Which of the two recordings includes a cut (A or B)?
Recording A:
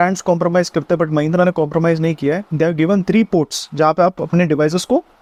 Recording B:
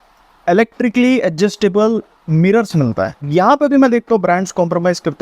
B